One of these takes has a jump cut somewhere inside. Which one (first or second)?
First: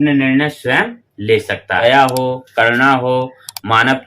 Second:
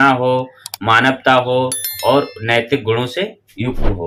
first